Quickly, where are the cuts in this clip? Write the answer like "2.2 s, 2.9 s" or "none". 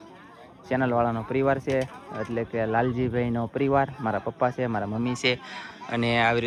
none